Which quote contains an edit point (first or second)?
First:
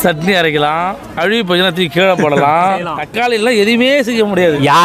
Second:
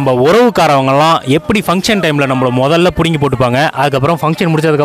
first